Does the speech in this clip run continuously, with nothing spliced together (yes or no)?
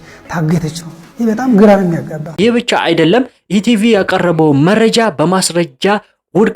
no